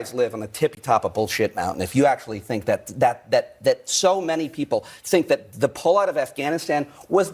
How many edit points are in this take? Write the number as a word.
zero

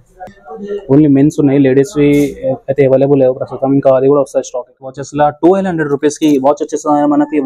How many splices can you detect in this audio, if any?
one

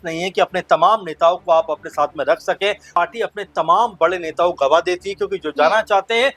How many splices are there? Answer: one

